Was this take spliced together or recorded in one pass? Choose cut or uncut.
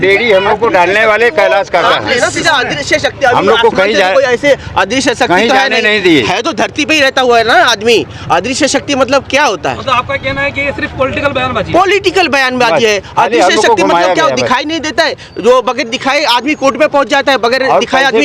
uncut